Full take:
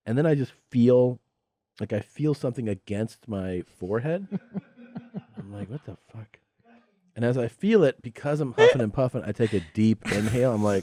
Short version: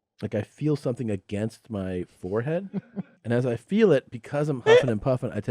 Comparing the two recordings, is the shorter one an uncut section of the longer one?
no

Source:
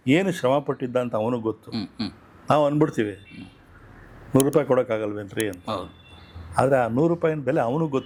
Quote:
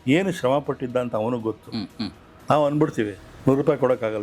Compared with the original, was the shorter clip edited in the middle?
yes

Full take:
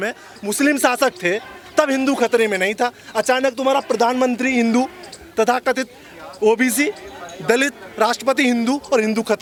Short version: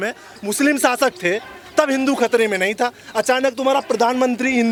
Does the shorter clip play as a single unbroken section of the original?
yes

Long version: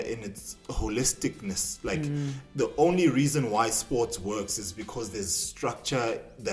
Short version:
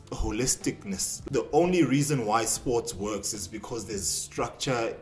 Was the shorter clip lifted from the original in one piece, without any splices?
no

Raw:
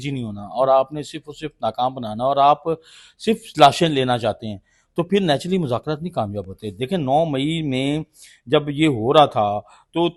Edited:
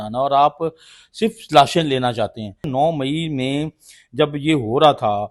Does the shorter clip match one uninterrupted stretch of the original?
no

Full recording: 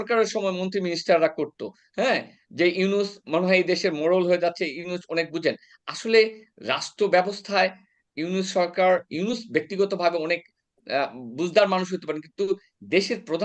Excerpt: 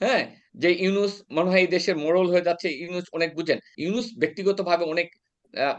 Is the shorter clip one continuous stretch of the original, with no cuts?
no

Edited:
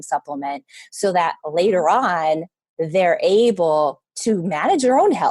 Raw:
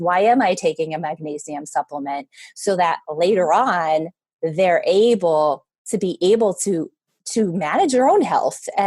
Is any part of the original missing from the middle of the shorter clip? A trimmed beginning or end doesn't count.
yes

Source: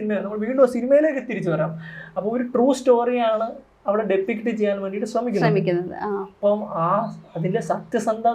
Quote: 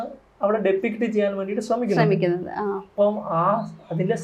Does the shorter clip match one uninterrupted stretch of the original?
yes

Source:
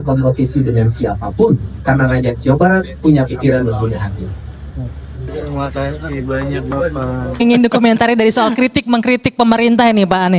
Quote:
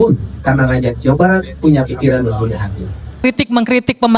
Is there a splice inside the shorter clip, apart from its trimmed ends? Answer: yes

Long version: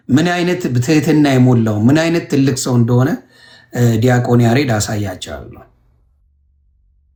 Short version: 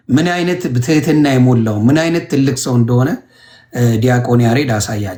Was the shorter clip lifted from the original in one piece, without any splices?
yes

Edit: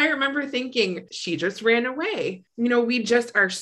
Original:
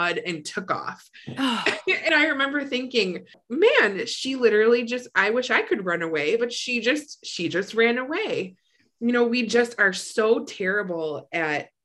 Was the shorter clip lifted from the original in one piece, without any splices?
no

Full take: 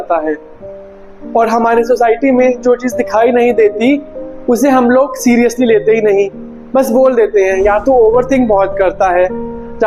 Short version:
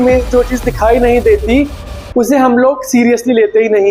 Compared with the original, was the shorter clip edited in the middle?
no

